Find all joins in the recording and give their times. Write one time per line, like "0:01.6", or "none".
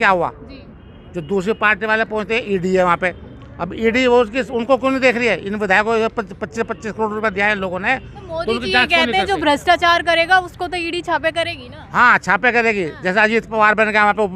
none